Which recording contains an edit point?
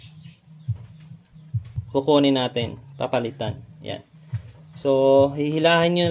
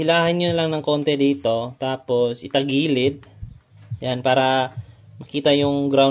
first; 1 cut; at 1.8 s

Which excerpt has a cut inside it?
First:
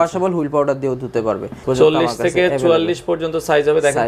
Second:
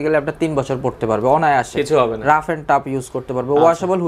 first; 1 cut; at 1.6 s

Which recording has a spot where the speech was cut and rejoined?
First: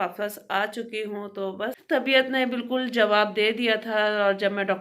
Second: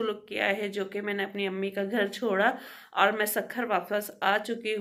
first; 1 cut; at 2.0 s

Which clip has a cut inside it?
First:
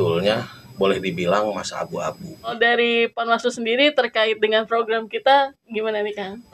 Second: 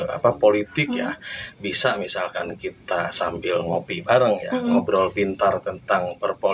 first; 1 cut; at 2.5 s

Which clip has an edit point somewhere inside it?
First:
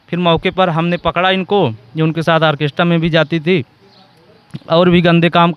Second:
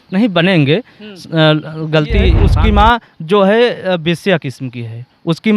second; 1 cut; at 2.4 s

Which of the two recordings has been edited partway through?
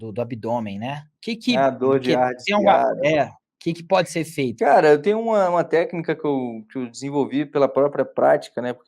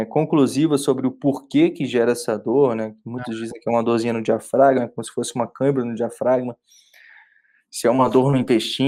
first; 2 cuts; at 3.5 s, 4.5 s

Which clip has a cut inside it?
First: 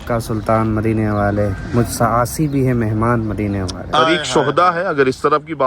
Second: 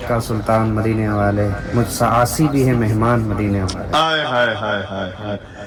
first; 1 cut; at 4.1 s

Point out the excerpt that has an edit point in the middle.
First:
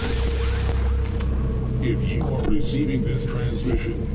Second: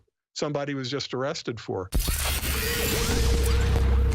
second; 1 cut; at 1.9 s

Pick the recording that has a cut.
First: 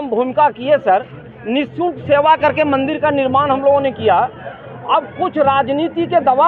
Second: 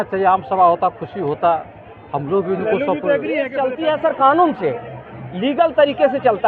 second; 1 cut; at 3.5 s

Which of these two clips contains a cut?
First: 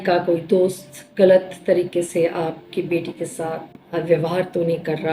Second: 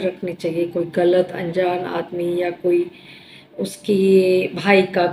first; 1 cut; at 3.7 s

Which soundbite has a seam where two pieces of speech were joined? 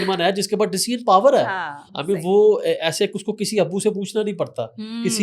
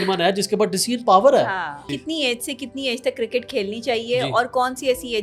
second; 1 cut; at 1.9 s

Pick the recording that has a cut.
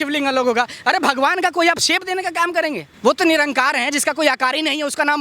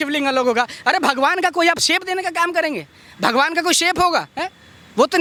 first; 1 cut; at 2.9 s

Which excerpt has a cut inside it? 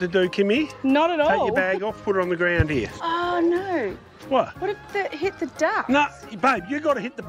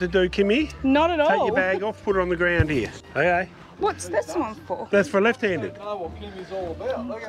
first; 1 cut; at 3.0 s

